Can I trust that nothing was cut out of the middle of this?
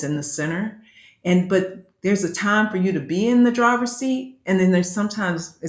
yes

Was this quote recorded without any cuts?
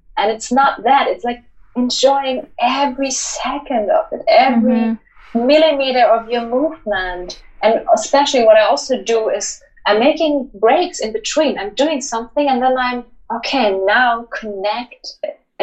yes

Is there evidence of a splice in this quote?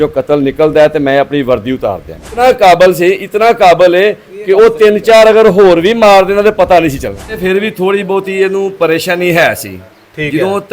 yes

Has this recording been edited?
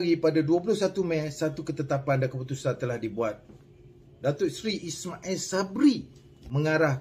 no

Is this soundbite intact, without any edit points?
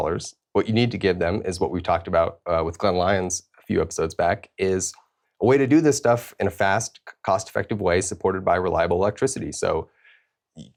yes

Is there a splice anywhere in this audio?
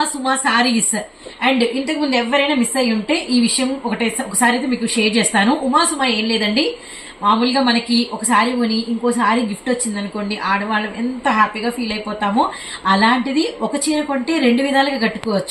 no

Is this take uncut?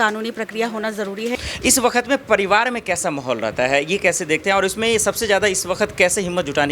no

